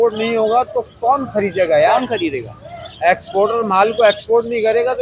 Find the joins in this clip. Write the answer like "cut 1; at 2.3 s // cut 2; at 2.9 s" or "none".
none

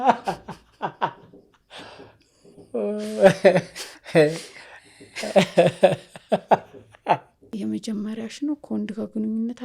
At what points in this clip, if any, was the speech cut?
cut 1; at 7.5 s

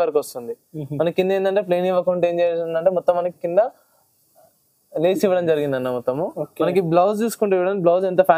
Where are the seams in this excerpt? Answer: none

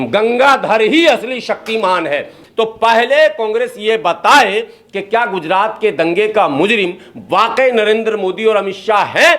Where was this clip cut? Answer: cut 1; at 2.4 s

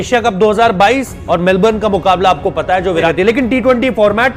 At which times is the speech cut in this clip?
cut 1; at 1.2 s // cut 2; at 3.1 s

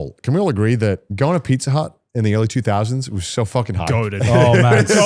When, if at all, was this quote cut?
cut 1; at 1.1 s

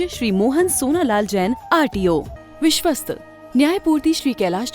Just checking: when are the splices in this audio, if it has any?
cut 1; at 2.4 s

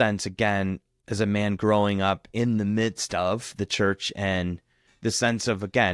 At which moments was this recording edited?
cut 1; at 0.9 s

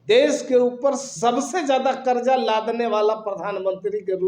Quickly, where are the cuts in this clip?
none

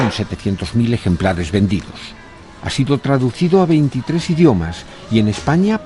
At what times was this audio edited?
none

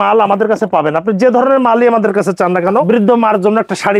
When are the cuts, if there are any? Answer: cut 1; at 2.8 s

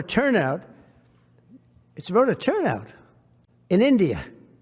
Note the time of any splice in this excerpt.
none

